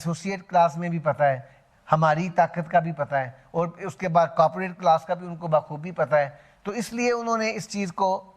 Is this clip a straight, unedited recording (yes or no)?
yes